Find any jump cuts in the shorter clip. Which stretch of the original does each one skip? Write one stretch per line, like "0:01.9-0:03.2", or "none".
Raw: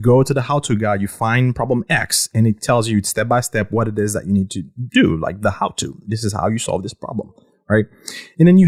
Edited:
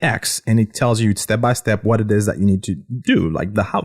none